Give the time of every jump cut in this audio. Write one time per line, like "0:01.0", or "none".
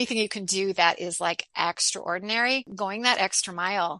0:02.7